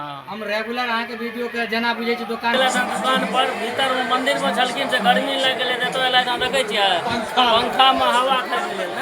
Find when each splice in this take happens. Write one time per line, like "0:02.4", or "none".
0:02.6